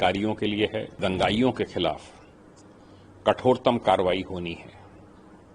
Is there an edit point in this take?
yes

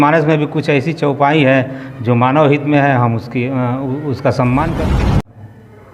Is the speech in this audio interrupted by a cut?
yes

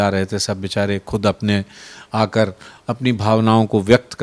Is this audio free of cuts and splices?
yes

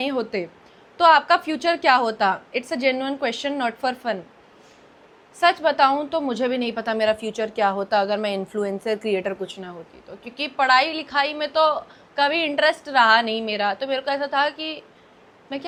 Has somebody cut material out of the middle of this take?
no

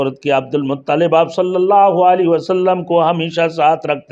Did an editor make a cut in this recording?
no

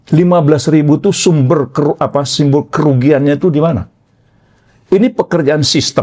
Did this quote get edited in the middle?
no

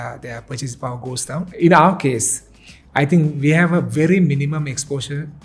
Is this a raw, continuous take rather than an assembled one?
no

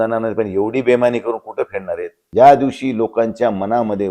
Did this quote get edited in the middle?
yes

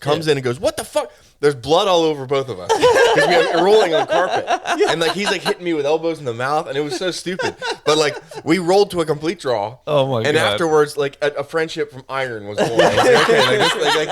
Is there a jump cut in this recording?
no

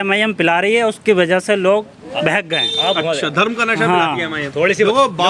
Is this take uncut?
yes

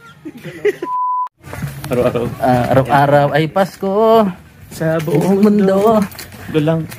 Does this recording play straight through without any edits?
no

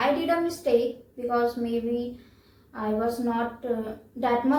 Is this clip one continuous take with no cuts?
yes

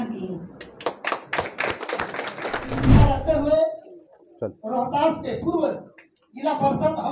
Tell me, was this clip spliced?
yes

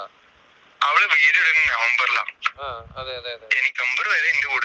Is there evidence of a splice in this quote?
yes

